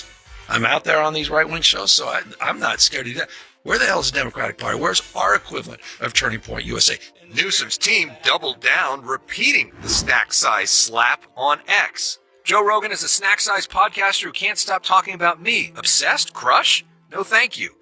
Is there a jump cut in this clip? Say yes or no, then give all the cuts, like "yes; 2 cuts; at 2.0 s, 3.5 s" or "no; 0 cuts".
no; 0 cuts